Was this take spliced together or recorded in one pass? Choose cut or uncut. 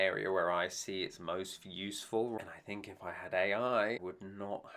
cut